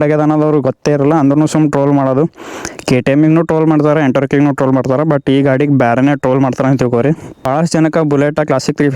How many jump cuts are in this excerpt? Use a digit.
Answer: 1